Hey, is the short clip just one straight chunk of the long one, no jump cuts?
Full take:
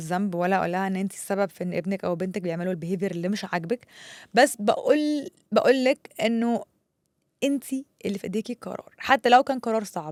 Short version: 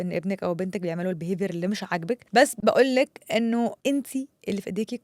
no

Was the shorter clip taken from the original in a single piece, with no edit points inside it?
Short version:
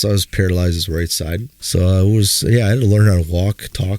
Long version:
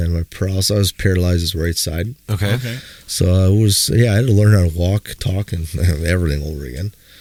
no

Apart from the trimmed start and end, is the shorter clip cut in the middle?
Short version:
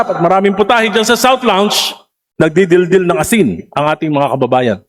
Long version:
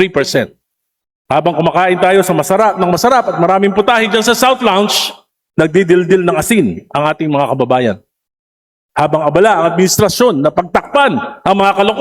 no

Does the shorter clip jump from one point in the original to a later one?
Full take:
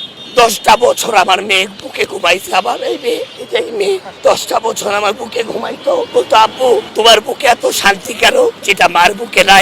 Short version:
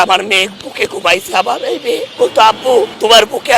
yes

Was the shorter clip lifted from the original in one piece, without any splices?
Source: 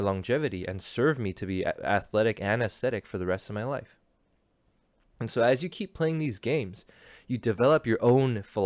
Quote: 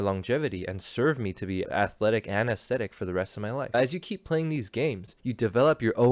no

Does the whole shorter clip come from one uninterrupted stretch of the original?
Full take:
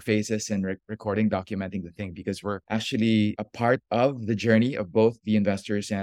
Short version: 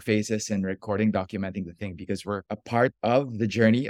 no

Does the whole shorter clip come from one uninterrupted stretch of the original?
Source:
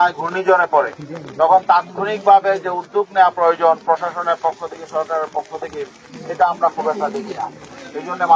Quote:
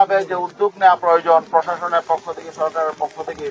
yes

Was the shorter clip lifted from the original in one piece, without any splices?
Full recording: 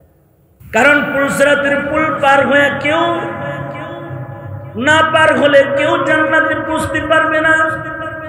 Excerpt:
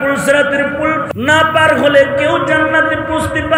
no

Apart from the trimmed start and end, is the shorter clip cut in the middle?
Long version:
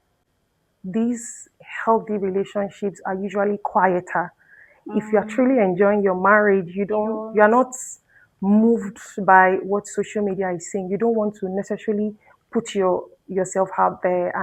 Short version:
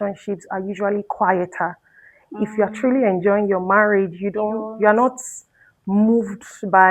no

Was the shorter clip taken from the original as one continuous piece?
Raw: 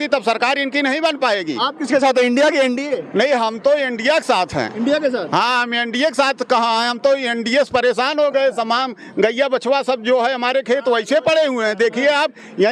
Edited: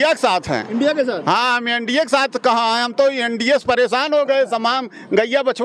yes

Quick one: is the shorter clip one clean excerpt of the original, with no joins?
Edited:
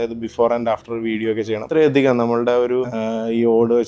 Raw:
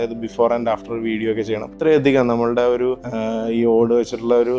no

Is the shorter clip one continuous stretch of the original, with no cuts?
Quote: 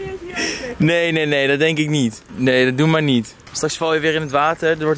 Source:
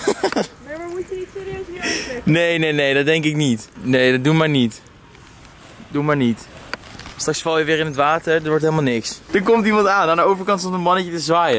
no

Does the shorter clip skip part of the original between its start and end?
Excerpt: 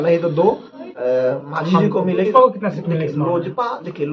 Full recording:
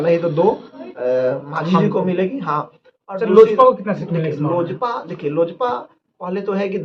yes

